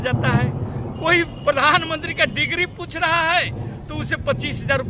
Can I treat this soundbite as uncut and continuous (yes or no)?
yes